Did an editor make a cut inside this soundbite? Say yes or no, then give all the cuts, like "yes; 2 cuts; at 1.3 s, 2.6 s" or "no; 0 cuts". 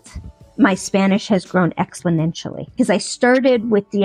no; 0 cuts